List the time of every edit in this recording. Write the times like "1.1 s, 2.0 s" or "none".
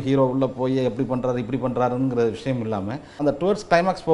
3.2 s